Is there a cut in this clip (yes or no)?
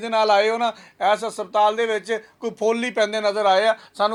no